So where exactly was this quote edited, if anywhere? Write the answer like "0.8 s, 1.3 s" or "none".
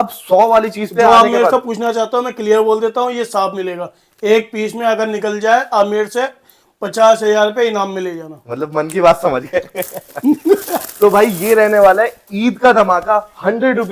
none